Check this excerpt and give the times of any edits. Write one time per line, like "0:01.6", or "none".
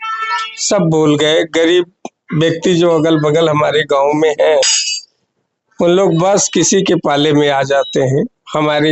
none